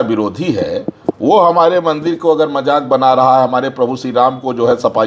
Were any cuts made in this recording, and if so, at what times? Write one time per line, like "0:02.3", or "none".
none